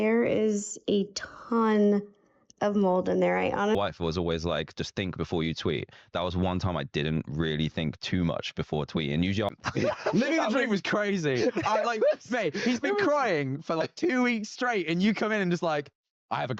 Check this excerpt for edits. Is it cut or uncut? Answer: cut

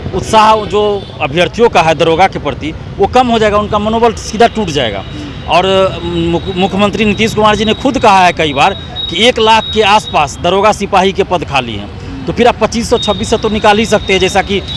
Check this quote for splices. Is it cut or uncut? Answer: uncut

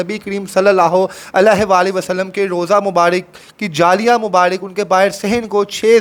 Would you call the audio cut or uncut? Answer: uncut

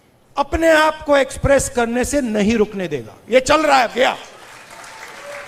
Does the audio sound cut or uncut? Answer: uncut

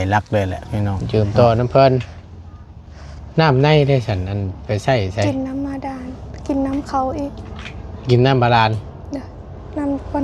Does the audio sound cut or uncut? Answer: cut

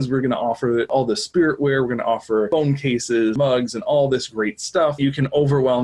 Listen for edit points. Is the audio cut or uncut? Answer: cut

